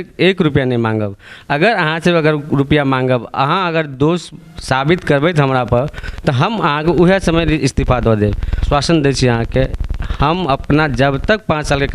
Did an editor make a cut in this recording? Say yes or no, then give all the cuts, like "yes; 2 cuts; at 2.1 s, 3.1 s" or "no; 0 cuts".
yes; 1 cut; at 8.6 s